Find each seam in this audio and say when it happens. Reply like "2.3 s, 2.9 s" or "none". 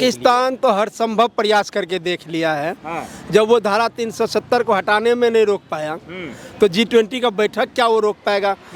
none

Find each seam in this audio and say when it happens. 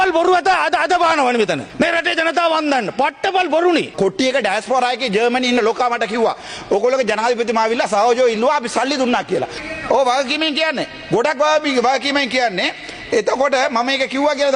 3.9 s, 9.6 s

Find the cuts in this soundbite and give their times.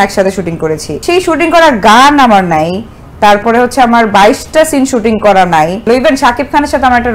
0.9 s, 5.8 s

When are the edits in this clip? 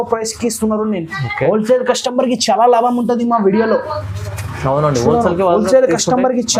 none

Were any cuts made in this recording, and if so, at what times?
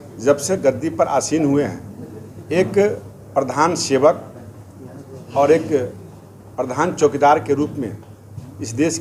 none

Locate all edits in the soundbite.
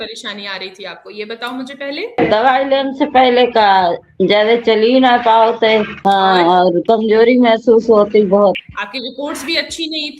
8.7 s

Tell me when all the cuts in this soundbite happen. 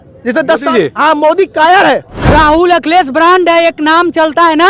2.1 s

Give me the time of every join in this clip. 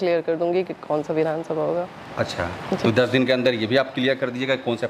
none

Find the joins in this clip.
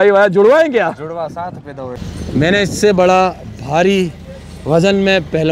2.0 s

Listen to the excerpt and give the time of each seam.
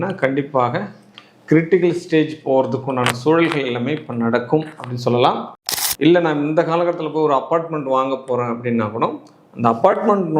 5.5 s

